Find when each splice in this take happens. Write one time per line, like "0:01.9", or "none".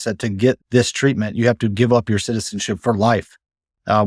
none